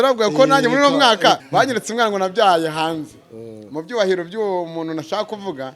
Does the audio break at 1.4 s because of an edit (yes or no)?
yes